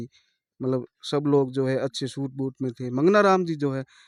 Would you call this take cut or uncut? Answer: uncut